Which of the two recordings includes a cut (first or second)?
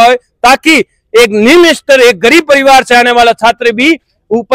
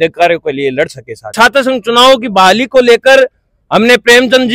second